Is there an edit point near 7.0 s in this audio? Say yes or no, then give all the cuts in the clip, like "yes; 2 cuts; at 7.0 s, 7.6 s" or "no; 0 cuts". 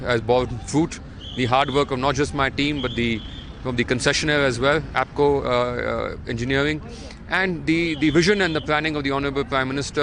no; 0 cuts